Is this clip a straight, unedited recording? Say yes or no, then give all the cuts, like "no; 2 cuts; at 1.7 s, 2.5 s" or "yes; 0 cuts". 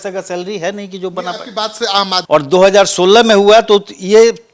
no; 1 cut; at 2.2 s